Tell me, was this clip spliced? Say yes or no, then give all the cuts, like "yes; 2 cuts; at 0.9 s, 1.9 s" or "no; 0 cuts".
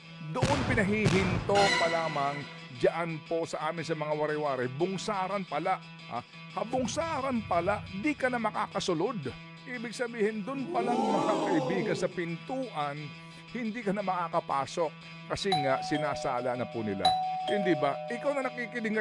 no; 0 cuts